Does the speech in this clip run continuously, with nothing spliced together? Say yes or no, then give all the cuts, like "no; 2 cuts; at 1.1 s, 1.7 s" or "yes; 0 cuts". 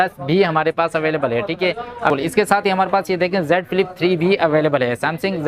no; 1 cut; at 2.1 s